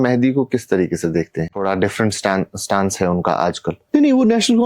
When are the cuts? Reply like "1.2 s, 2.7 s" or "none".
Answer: 1.6 s, 3.8 s